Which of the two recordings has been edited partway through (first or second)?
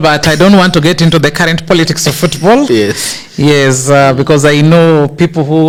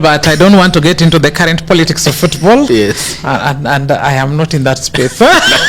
second